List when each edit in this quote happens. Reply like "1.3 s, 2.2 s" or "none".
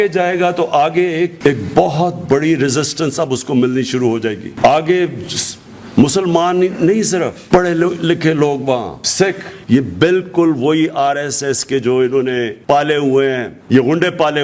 9.5 s, 12.5 s, 13.5 s